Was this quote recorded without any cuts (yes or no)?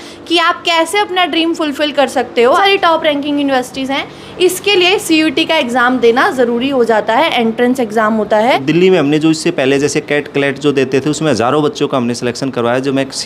no